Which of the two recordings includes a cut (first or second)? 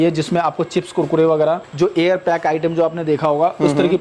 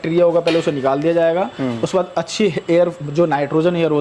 first